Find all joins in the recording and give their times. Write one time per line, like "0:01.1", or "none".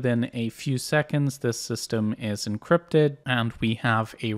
0:03.2